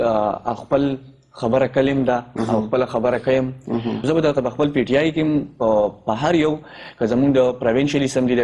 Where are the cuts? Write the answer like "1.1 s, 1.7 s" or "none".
4.0 s